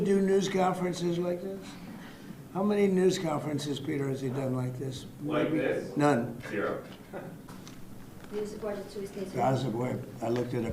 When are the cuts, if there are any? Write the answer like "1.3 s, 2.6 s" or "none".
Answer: 7.4 s